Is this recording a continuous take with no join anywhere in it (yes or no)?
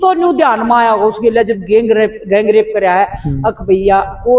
yes